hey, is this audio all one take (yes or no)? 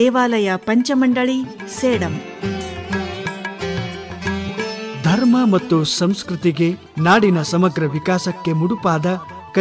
no